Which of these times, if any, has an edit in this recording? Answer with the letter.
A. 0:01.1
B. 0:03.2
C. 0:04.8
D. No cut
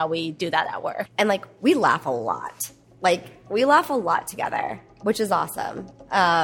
A